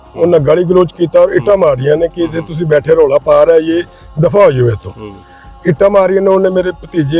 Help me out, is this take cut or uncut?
uncut